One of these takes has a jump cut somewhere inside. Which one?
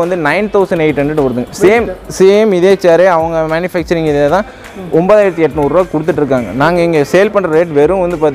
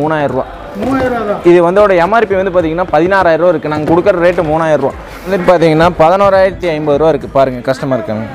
second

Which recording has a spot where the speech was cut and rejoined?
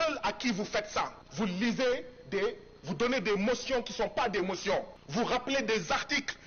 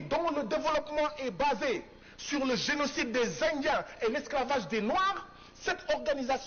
first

